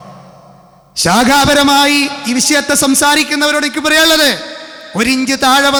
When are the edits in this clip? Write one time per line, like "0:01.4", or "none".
none